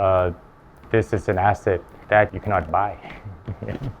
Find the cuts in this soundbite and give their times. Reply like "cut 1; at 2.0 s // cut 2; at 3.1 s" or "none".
cut 1; at 2.3 s